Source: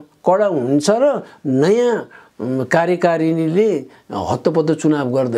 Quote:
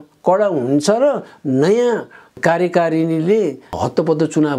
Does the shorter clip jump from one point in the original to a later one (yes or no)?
yes